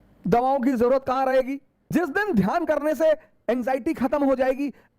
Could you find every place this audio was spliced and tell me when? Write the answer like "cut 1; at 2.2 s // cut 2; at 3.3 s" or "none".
cut 1; at 1.8 s